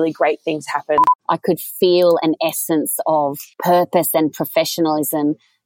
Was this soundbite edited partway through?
yes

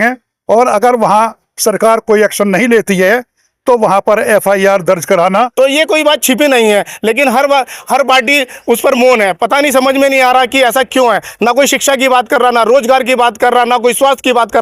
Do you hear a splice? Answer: yes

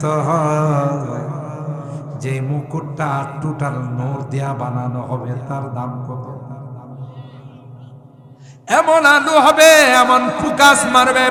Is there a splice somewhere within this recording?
no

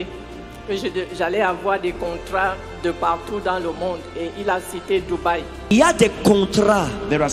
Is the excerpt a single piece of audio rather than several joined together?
no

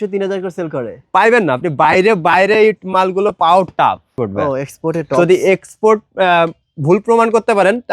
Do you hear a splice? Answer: yes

